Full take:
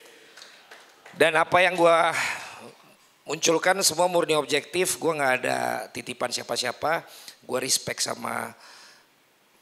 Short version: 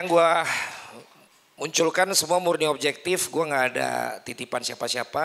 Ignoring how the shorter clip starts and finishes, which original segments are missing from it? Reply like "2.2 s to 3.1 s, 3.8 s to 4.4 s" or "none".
none